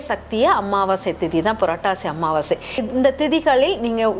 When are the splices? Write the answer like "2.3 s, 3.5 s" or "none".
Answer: 2.8 s